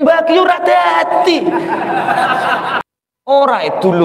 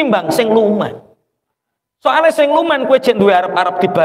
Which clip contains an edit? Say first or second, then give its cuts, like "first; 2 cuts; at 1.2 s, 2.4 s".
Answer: first; 1 cut; at 2.8 s